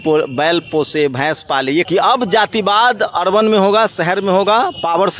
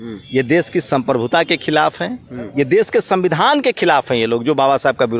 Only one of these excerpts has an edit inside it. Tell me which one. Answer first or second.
first